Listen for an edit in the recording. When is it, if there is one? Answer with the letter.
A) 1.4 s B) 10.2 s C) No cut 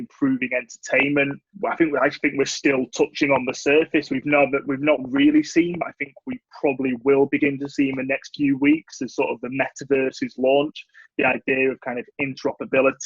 A